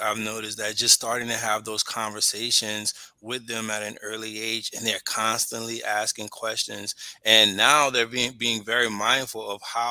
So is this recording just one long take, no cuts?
yes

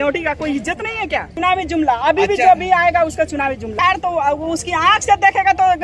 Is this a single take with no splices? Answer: no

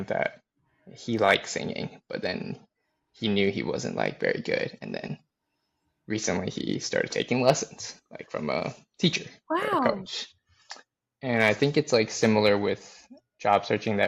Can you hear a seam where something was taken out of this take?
no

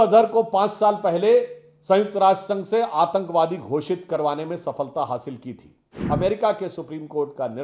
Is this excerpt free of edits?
no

